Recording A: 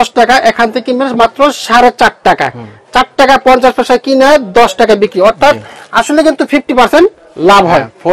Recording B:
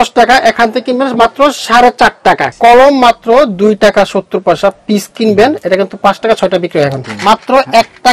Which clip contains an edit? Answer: B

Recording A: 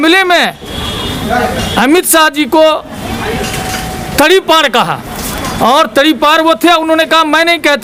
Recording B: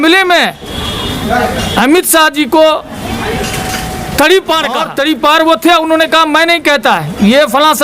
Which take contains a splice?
B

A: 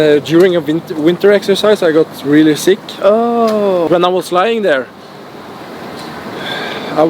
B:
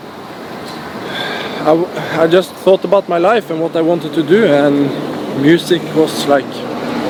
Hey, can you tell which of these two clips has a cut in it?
A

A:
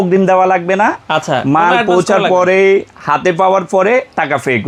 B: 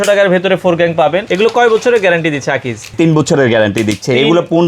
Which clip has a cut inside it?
B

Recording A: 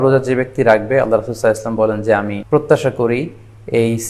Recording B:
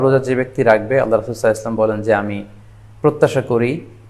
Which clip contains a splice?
A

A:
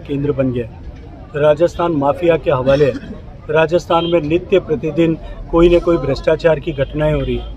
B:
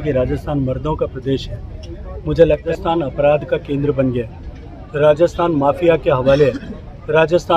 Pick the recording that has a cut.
B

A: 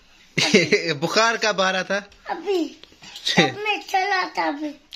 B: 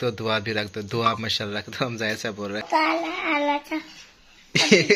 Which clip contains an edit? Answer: B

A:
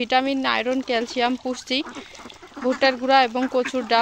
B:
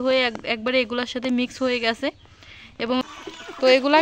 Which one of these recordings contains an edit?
B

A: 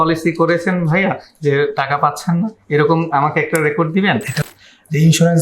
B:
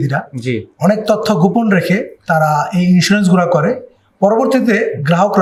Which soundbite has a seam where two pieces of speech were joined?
A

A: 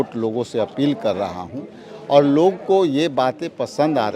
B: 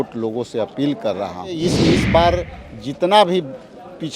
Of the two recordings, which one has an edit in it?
B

